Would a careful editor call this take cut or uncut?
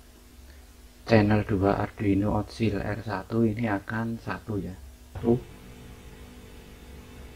cut